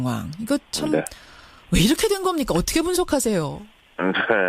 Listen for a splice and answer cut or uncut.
cut